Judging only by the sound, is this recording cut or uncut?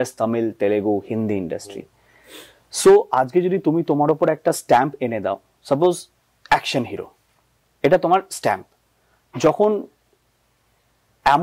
uncut